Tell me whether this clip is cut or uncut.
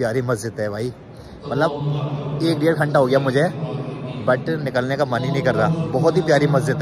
uncut